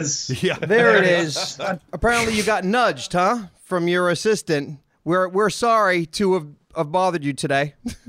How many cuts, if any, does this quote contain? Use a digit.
0